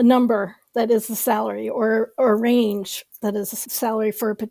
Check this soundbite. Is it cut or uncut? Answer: cut